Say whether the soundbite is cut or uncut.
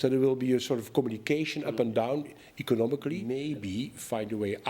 cut